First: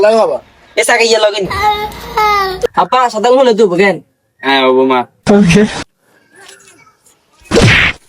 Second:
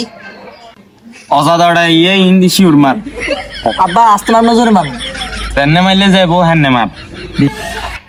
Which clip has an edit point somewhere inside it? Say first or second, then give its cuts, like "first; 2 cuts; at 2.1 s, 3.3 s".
first; 1 cut; at 2.7 s